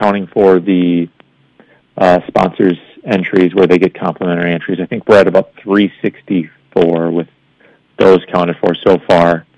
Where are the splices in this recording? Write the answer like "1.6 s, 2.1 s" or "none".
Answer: none